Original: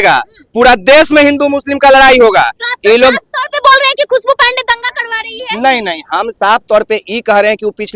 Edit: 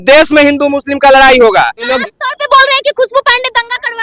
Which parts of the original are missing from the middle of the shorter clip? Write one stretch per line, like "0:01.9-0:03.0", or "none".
0:02.7-0:03.1